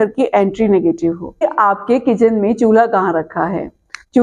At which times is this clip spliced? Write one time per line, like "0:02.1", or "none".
0:01.4